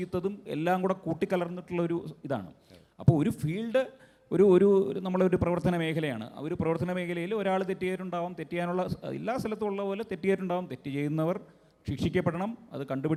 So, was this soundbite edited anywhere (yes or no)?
no